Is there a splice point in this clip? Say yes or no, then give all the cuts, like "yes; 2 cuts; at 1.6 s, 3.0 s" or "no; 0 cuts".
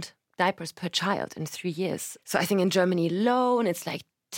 yes; 1 cut; at 2.1 s